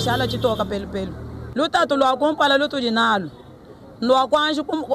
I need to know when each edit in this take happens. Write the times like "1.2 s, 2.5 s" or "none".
1.3 s

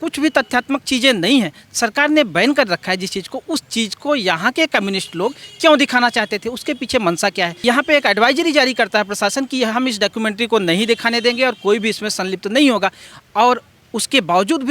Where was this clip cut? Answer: 7.6 s

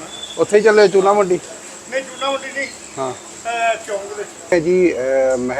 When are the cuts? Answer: 4.5 s

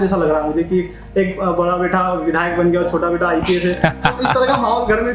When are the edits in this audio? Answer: none

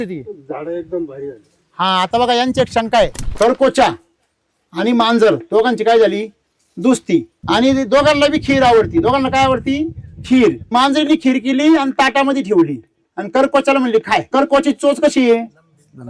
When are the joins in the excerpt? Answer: 3.2 s, 7.3 s, 10.7 s, 14.3 s

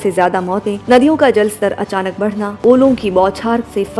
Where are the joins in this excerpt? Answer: none

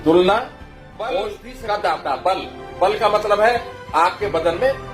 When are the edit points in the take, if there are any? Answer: 1.1 s

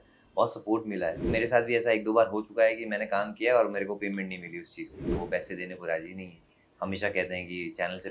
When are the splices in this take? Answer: 1.3 s, 5.2 s

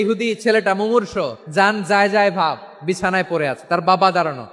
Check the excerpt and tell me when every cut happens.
1.4 s

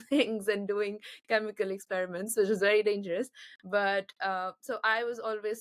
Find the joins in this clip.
none

